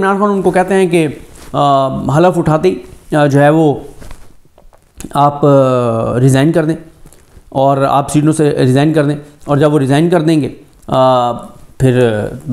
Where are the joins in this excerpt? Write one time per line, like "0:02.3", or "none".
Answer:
none

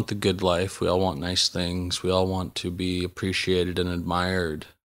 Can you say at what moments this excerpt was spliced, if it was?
none

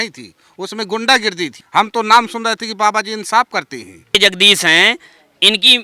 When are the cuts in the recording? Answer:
0:01.6
0:04.1

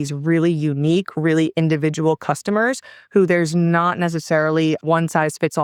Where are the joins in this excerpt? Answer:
none

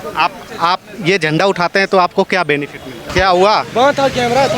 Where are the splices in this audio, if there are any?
0:03.1

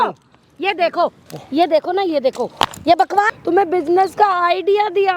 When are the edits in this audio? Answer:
0:01.3
0:03.3

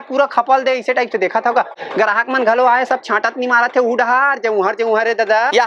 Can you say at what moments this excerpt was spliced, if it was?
none

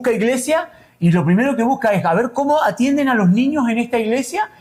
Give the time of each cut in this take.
none

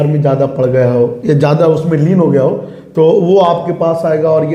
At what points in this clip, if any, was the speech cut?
none

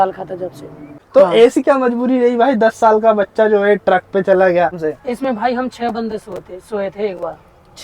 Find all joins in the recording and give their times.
0:00.9
0:04.9

